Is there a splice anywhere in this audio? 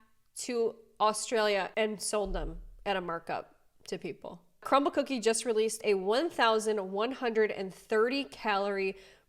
yes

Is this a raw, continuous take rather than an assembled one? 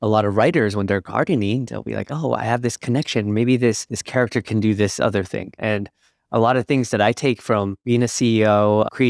yes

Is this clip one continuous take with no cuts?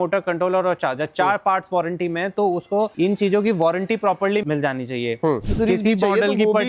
no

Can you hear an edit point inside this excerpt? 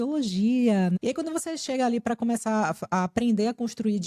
yes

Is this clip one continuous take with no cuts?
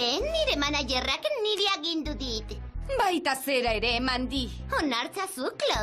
no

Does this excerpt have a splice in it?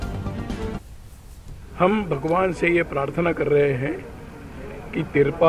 yes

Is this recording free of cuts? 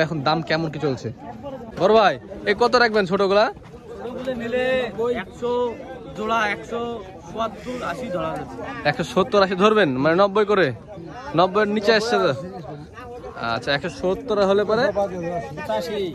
no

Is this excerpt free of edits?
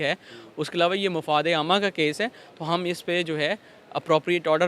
yes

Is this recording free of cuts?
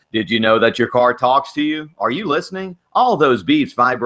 yes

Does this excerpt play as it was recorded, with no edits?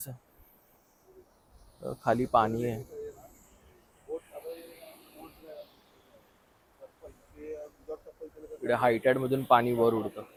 yes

